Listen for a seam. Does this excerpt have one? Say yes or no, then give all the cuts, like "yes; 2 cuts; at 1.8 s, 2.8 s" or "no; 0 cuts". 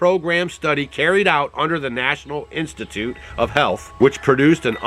yes; 1 cut; at 3.9 s